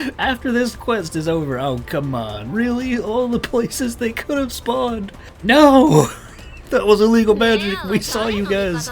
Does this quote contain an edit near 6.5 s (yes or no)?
no